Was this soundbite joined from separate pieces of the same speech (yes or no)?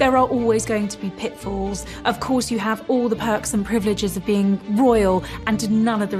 no